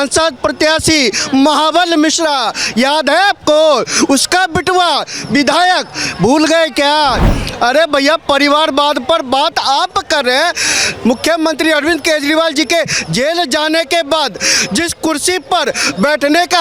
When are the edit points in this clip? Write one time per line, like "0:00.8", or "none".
none